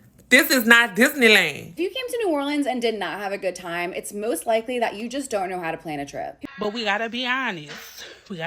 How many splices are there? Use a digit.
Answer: 2